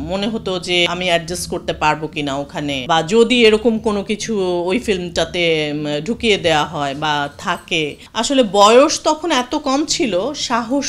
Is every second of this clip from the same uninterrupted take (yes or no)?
no